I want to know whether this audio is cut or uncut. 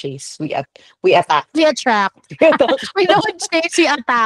uncut